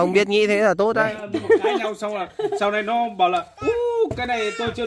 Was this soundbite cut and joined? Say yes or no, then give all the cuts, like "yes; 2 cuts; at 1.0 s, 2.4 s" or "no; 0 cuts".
yes; 1 cut; at 1.2 s